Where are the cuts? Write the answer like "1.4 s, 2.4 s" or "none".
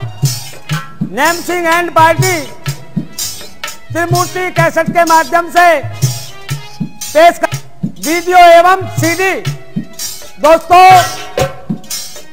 7.4 s